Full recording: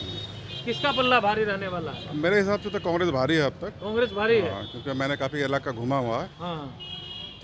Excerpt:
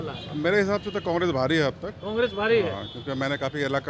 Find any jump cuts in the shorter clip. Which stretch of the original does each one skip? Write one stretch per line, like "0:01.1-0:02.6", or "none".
none